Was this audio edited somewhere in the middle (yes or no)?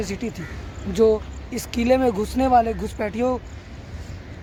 no